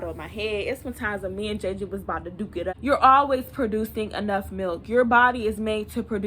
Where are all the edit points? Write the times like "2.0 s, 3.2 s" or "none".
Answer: 2.7 s